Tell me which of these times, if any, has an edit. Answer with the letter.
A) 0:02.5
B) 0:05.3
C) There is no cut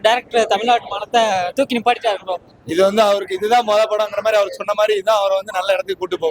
A